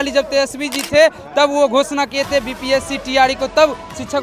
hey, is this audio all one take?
yes; 0 cuts

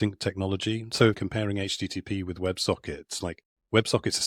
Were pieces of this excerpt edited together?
yes; 1 cut; at 1.2 s

